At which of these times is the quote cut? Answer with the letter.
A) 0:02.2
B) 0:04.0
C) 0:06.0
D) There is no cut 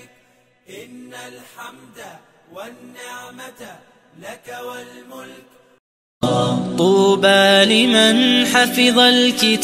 C